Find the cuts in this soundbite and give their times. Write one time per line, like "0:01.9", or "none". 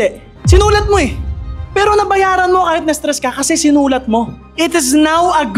0:01.6